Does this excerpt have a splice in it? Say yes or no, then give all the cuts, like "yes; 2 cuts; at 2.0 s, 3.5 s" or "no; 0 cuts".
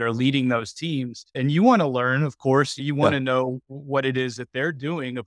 yes; 2 cuts; at 1.4 s, 2.8 s